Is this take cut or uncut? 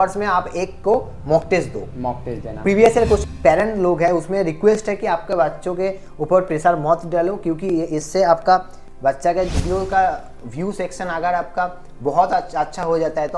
cut